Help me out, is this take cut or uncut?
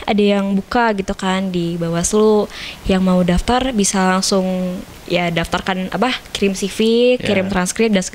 uncut